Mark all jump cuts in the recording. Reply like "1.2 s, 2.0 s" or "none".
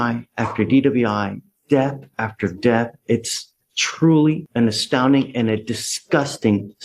none

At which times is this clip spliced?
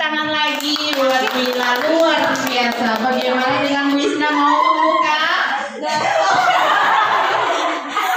none

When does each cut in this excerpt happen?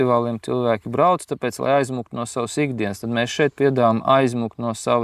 none

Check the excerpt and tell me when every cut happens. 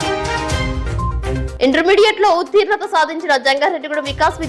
1.1 s

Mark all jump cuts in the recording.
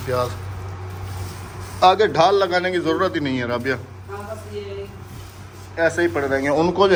none

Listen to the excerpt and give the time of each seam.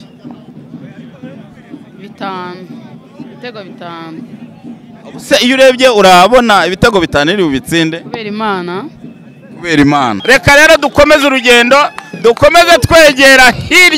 10.2 s

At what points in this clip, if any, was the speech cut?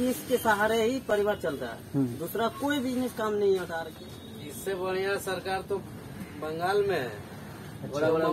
3.7 s

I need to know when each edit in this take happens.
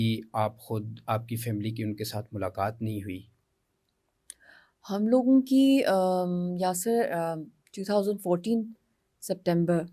none

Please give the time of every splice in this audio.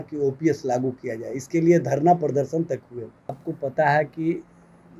3.4 s

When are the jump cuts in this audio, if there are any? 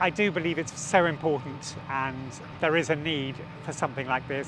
1.8 s

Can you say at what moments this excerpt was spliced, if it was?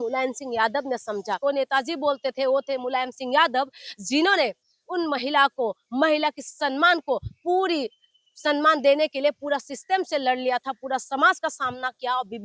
1.3 s

